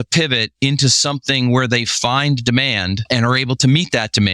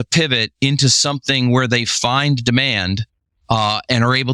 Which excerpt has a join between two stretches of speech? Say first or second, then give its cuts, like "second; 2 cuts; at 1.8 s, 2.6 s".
first; 1 cut; at 3.0 s